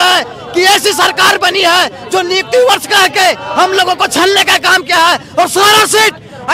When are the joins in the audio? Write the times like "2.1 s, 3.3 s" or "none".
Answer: none

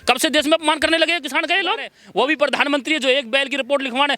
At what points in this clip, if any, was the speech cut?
2.0 s

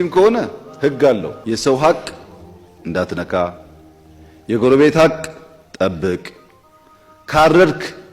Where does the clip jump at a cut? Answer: 1.3 s

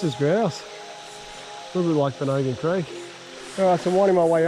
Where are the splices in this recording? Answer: 3.6 s

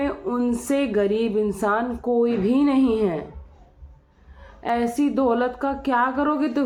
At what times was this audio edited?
none

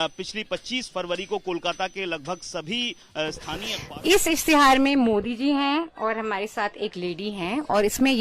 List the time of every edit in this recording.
3.7 s

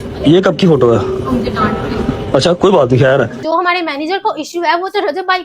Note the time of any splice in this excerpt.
3.4 s

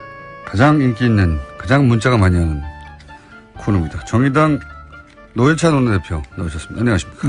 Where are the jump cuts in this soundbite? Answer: none

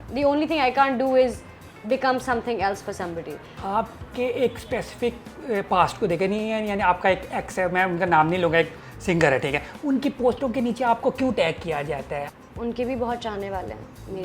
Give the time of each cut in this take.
3.6 s, 12.3 s

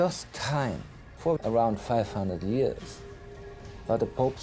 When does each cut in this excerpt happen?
1.3 s

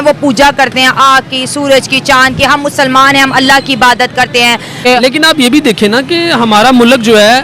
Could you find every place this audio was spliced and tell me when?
4.7 s

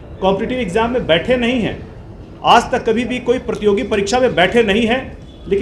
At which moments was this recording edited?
none

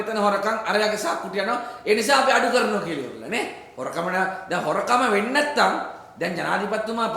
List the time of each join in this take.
none

